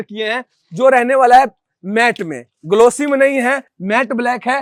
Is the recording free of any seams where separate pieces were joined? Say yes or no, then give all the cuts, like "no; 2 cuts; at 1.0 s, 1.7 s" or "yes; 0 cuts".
yes; 0 cuts